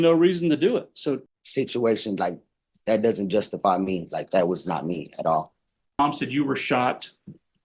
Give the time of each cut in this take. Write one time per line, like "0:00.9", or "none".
0:01.3
0:06.0